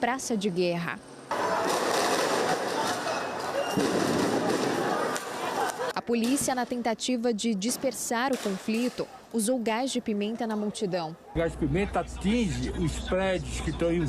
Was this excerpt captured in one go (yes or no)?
no